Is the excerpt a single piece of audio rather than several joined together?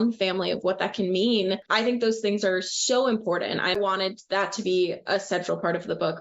no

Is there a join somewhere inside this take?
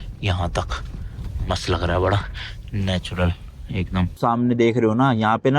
yes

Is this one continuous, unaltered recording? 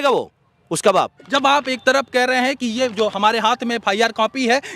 no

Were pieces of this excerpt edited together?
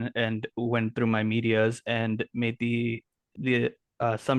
no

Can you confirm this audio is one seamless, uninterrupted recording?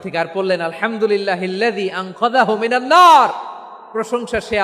yes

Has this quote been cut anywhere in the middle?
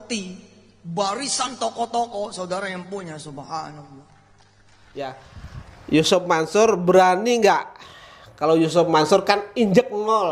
yes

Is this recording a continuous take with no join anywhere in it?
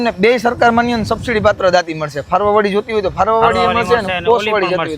yes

